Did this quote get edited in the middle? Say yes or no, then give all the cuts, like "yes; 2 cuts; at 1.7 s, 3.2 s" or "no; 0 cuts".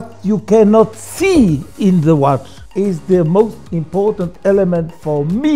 yes; 1 cut; at 2.6 s